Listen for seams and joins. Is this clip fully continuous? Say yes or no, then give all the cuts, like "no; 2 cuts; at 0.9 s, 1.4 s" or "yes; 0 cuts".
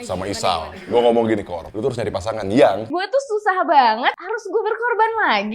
no; 1 cut; at 2.9 s